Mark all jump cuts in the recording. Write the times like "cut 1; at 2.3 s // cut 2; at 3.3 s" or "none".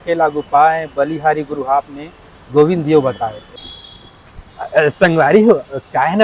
cut 1; at 3.5 s